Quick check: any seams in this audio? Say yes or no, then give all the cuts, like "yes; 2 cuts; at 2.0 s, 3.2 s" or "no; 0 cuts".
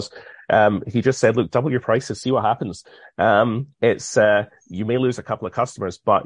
no; 0 cuts